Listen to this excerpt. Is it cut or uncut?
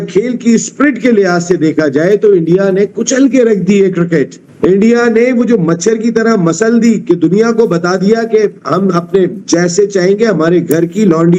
uncut